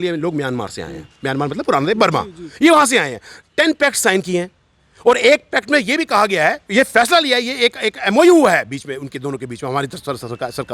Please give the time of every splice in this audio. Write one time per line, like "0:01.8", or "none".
none